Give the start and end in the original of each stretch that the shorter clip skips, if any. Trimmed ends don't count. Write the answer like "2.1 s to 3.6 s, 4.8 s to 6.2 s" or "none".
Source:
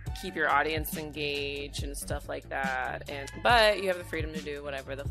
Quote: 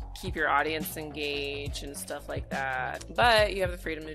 3.1 s to 3.3 s